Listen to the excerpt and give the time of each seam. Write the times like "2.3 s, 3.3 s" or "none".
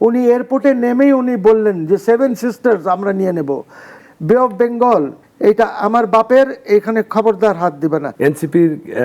4.0 s, 8.1 s